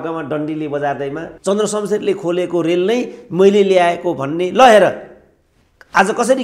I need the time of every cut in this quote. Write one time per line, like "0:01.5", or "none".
0:01.3